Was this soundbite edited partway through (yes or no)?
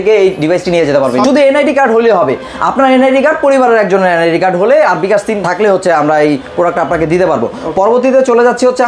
no